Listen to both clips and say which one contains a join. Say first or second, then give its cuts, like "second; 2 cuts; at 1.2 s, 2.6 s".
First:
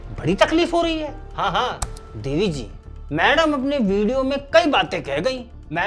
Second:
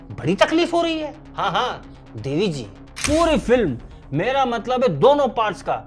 second; 1 cut; at 2.9 s